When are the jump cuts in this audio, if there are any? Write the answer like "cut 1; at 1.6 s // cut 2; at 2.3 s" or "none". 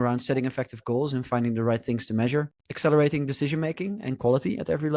cut 1; at 2.6 s

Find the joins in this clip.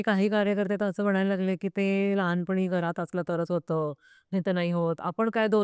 none

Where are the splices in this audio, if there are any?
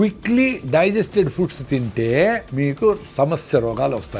cut 1; at 2.5 s

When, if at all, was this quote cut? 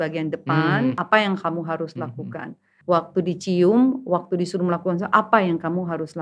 none

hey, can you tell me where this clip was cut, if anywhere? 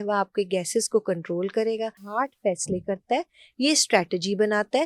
cut 1; at 2.0 s

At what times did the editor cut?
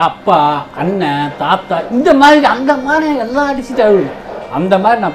none

